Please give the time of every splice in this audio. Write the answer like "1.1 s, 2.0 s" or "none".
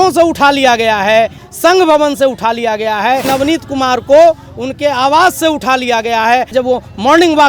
1.4 s, 3.2 s, 6.5 s